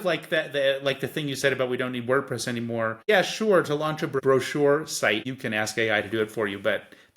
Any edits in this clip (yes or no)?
yes